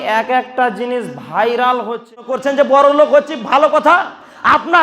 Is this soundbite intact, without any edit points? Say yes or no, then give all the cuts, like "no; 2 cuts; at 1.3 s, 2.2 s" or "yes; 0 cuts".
no; 1 cut; at 2.4 s